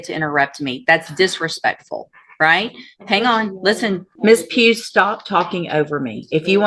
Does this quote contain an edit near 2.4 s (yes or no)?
no